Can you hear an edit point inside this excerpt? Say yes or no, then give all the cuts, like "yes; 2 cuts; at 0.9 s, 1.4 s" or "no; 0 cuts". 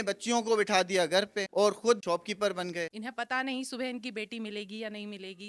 yes; 1 cut; at 3.0 s